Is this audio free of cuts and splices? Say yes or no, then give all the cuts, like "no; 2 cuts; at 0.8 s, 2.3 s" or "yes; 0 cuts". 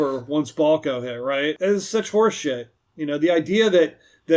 no; 1 cut; at 1.6 s